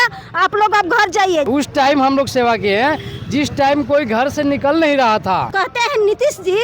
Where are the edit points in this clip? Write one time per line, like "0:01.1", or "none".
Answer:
0:01.5
0:05.5